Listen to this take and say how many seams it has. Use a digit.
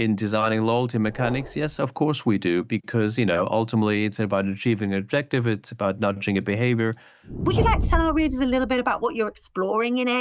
1